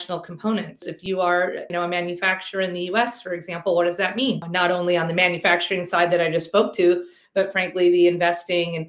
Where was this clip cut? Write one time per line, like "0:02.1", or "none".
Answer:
0:00.8
0:01.7
0:04.5